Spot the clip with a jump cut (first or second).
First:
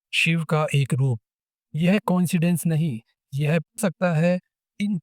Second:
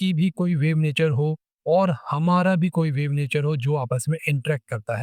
first